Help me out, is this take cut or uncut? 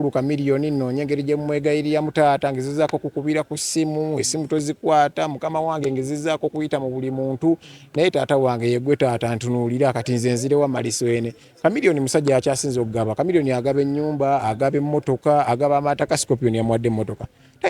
uncut